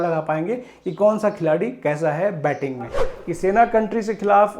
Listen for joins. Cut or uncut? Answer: cut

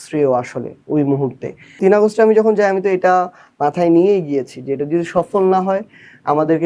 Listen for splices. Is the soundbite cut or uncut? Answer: cut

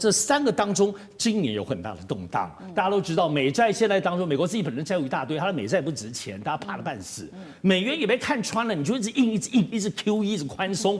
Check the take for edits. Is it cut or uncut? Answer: uncut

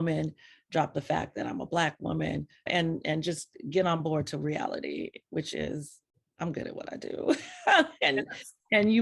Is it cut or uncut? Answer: uncut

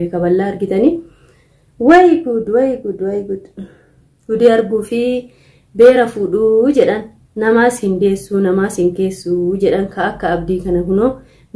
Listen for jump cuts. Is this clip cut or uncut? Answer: uncut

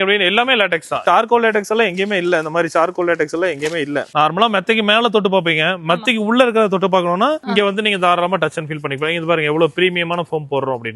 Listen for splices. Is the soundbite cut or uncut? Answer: cut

